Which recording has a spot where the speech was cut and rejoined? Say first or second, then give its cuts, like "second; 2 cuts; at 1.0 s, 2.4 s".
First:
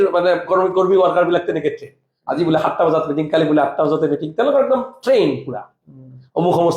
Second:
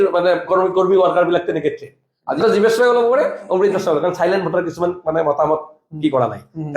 second; 1 cut; at 2.4 s